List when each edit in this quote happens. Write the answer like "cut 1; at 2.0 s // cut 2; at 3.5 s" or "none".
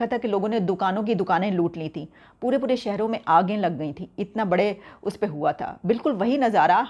none